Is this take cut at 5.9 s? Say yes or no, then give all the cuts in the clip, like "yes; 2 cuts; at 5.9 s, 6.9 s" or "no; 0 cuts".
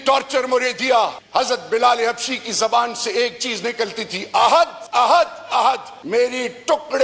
yes; 3 cuts; at 1.2 s, 4.8 s, 5.9 s